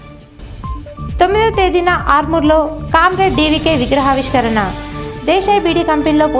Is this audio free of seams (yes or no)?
no